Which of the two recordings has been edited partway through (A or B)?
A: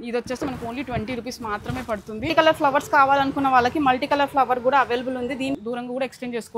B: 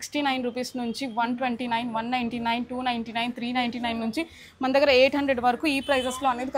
A